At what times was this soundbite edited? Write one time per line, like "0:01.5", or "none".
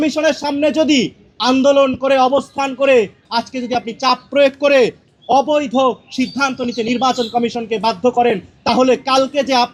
none